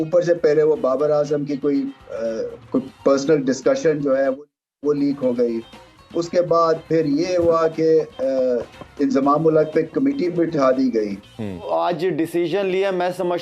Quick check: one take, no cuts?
no; 1 cut; at 11.6 s

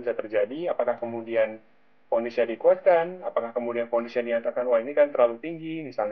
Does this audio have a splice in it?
no; 0 cuts

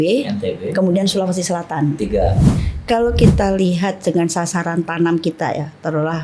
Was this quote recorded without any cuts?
no; 1 cut; at 2.5 s

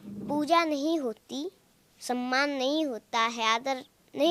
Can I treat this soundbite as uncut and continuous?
yes; 0 cuts

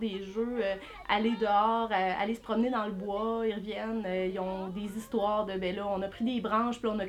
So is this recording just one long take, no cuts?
yes; 0 cuts

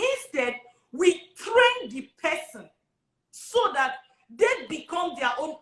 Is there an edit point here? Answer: no; 0 cuts

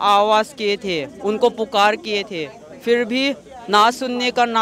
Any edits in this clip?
no; 0 cuts

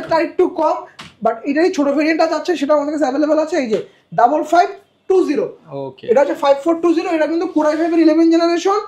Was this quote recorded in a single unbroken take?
yes; 0 cuts

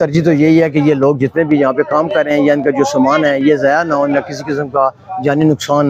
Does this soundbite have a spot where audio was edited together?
no; 0 cuts

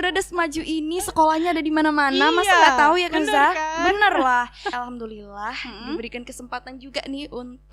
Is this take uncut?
no; 1 cut; at 4.7 s

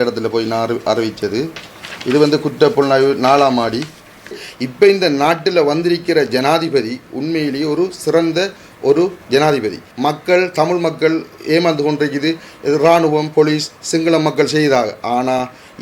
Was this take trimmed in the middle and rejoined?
yes; 2 cuts; at 4.4 s, 9.8 s

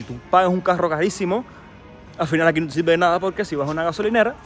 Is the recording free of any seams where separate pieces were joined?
yes; 0 cuts

